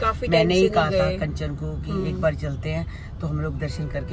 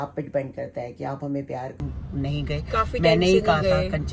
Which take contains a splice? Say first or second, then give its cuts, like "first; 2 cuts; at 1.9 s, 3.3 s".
second; 1 cut; at 1.8 s